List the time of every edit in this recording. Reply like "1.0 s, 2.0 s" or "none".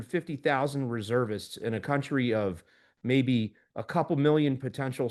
none